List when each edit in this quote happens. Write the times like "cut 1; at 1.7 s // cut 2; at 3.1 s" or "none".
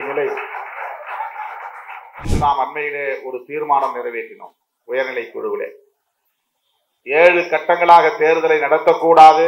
cut 1; at 2.3 s